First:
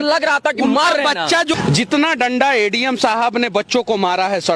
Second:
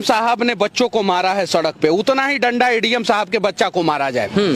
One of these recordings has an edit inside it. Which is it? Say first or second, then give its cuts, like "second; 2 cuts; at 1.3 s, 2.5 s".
first; 1 cut; at 1.5 s